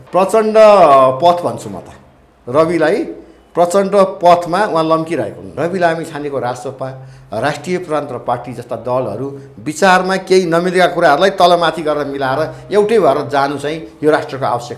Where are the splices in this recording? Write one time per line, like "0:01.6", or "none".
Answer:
0:05.4